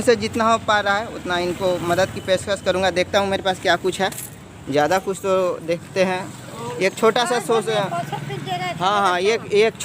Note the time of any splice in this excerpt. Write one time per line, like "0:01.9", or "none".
none